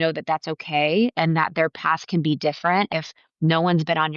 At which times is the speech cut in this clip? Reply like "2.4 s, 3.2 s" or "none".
2.9 s